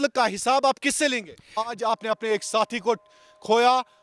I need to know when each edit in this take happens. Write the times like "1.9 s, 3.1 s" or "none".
1.7 s